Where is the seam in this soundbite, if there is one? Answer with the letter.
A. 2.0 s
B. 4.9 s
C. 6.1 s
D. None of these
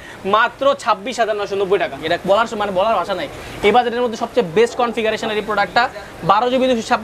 A